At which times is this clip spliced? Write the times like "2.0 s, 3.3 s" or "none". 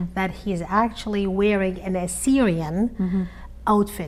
none